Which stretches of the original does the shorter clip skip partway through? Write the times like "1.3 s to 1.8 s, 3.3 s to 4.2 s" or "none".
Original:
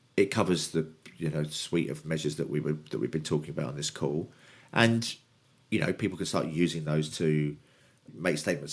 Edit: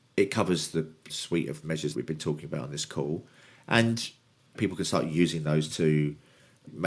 1.1 s to 1.5 s, 2.4 s to 3.0 s, 5.6 s to 6.0 s